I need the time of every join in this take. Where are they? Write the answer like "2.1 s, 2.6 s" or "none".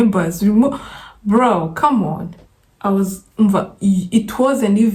none